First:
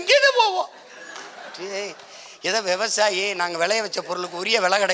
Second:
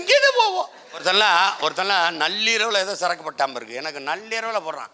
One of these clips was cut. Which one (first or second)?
second